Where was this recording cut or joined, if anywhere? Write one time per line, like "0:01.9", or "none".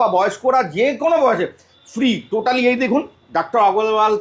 none